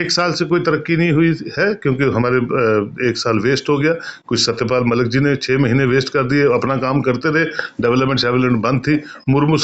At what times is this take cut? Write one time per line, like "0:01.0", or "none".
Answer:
none